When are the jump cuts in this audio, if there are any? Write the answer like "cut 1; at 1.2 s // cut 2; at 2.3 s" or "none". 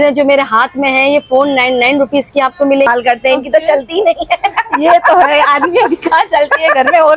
cut 1; at 2.9 s